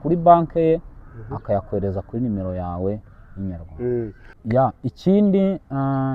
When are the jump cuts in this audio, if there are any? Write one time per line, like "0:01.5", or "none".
0:04.3

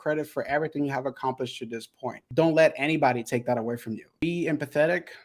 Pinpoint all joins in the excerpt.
0:02.2
0:04.2

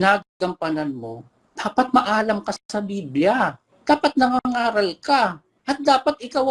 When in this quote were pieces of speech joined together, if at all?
0:03.7

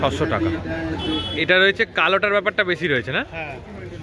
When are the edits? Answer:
0:01.3

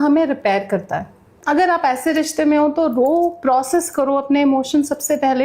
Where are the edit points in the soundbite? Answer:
none

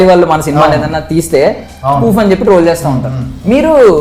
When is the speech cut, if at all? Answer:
none

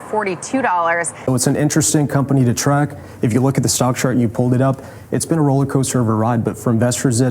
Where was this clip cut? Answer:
0:01.1

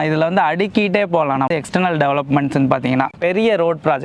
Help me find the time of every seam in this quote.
0:03.1

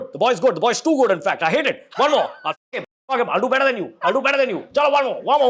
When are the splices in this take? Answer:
none

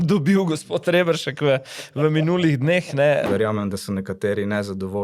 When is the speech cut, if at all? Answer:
0:03.3

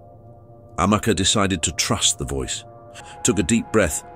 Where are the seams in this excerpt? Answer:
0:03.0

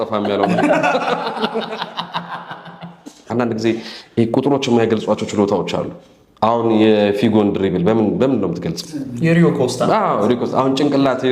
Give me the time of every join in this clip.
0:03.3

